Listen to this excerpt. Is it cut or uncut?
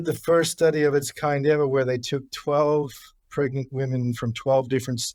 uncut